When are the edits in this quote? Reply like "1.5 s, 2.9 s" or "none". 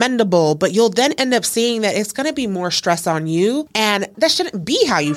4.1 s